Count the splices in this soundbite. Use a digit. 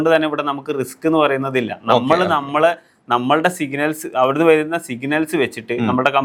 0